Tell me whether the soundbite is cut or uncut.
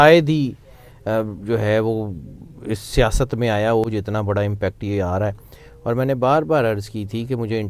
uncut